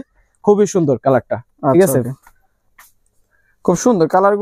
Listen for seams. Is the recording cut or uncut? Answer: uncut